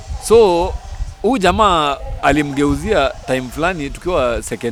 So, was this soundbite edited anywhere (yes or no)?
no